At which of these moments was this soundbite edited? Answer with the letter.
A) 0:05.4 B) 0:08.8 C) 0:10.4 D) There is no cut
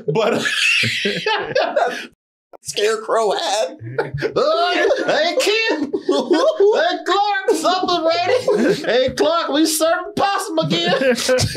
B